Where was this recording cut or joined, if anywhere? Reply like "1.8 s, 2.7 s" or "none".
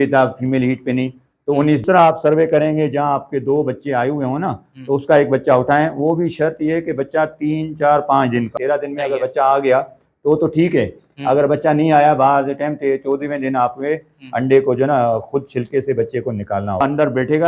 1.8 s, 8.5 s, 16.8 s